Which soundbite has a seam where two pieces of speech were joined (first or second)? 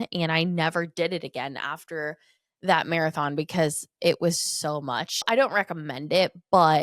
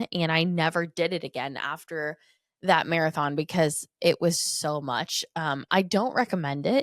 first